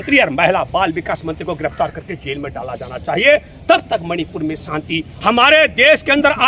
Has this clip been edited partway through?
yes; 1 cut; at 5.1 s

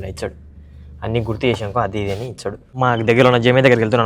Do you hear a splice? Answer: yes; 1 cut; at 2.7 s

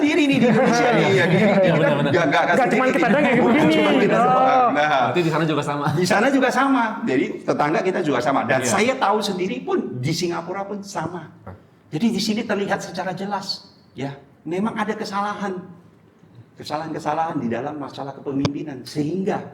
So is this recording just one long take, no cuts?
no; 1 cut; at 11.5 s

